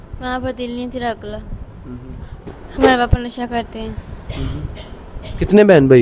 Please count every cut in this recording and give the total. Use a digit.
1